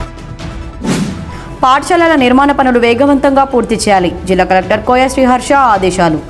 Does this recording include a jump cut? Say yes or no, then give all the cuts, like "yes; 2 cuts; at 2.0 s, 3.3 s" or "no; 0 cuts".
yes; 1 cut; at 0.9 s